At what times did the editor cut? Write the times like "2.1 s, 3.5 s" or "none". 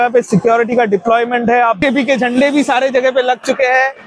1.8 s